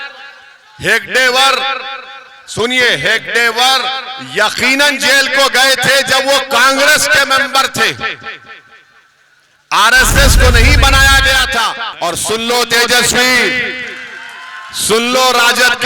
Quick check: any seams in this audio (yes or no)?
yes